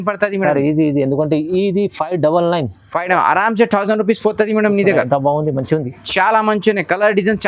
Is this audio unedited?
yes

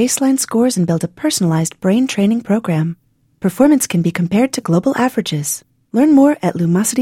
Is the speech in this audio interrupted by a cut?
no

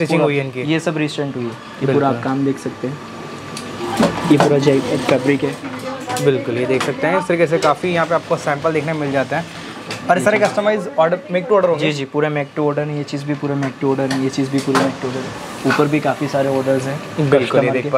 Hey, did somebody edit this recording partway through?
no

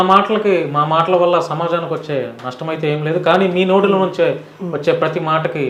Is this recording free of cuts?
yes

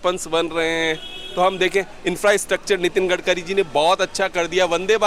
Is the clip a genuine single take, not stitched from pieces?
yes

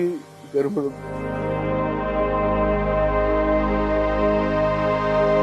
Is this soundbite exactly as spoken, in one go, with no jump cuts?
yes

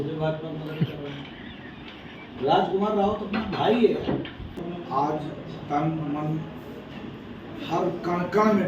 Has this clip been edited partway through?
yes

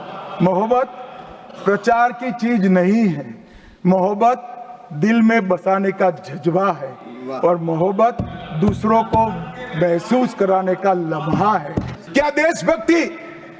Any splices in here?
yes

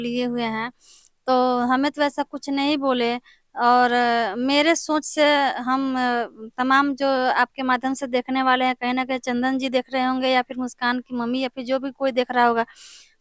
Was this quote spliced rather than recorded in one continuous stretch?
no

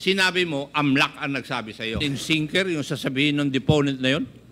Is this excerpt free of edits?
no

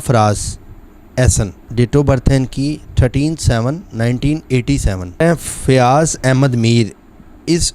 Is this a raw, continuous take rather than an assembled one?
no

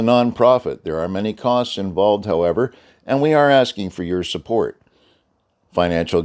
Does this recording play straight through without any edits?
yes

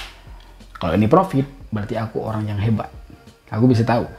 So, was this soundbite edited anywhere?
no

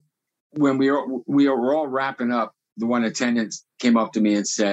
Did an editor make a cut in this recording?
yes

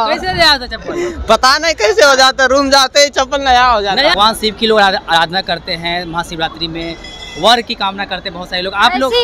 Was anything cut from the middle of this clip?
yes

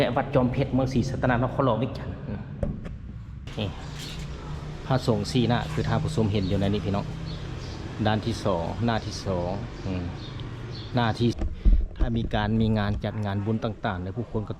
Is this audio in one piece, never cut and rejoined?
no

